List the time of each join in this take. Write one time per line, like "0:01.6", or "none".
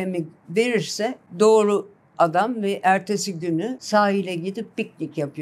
0:01.2
0:03.8